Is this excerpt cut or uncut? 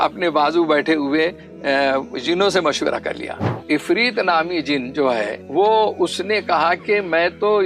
cut